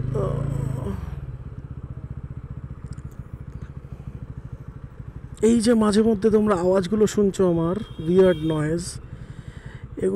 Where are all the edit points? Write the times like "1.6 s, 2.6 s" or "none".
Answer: none